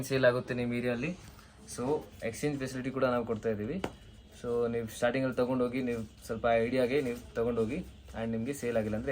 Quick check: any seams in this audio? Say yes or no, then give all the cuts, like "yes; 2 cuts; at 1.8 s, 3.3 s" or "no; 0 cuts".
no; 0 cuts